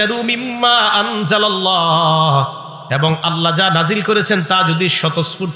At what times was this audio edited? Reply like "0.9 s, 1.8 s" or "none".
none